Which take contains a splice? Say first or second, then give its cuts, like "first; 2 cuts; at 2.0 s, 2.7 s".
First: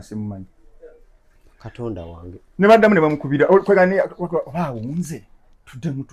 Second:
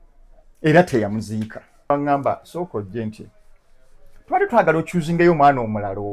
second; 1 cut; at 1.9 s